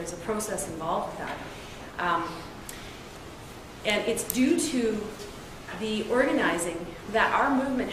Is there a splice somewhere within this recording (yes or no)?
no